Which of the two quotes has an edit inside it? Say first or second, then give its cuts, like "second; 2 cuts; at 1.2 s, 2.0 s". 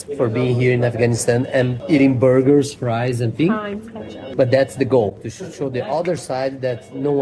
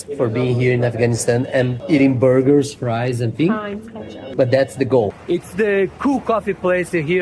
second; 1 cut; at 5.2 s